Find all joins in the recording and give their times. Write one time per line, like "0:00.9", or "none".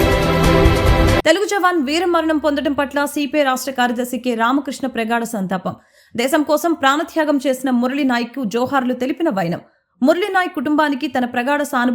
0:01.2

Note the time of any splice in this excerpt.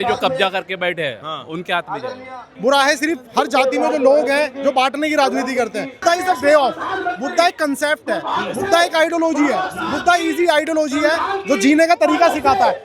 0:02.5
0:05.9

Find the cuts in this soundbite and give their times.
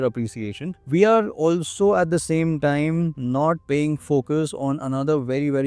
none

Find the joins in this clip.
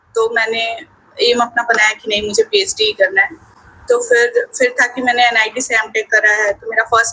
none

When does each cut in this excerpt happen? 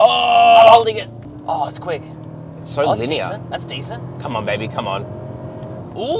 0:01.3

